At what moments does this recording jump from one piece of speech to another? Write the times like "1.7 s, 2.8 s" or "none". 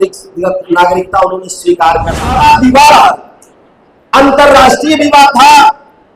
2.3 s